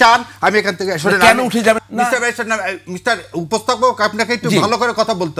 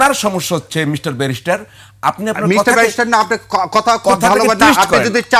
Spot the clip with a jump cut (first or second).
first